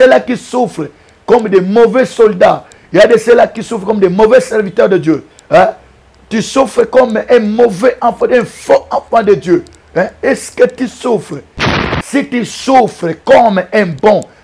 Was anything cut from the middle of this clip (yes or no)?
yes